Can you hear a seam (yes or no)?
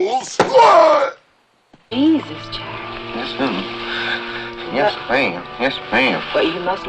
yes